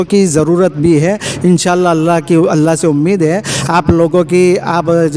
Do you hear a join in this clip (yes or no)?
no